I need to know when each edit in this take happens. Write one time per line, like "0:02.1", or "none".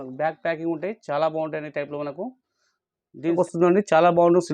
0:03.4

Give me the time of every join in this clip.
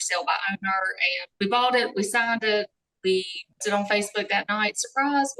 0:01.3

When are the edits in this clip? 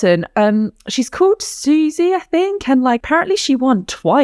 0:03.0

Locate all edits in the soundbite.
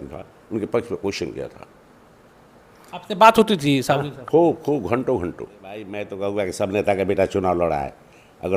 0:05.9

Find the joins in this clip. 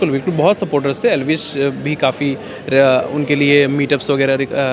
none

